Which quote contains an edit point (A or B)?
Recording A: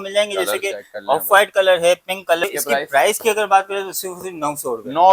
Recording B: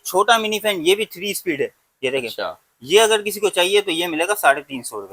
A